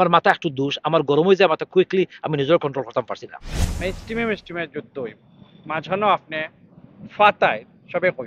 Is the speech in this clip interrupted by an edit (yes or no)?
yes